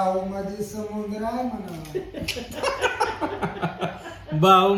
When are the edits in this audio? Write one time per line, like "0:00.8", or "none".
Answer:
none

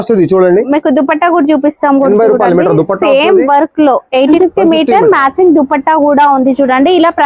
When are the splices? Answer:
0:04.3

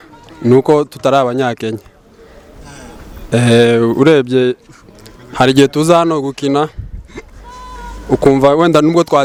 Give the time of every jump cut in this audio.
none

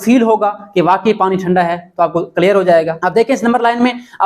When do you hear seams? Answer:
0:03.0

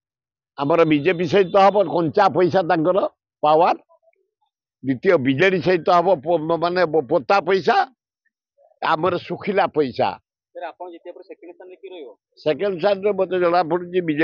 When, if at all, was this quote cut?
none

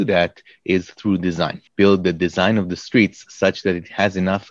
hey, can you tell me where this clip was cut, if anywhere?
0:01.6

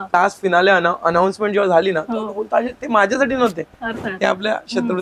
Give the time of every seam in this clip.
none

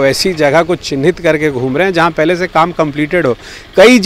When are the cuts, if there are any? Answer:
none

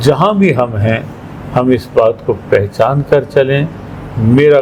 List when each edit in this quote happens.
none

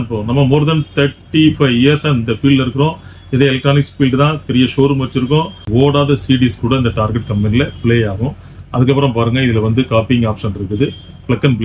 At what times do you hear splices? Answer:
0:05.6

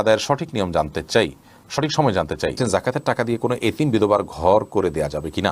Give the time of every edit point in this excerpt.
0:02.6

